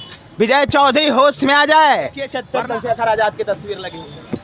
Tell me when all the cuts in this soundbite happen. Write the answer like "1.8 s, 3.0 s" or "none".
2.4 s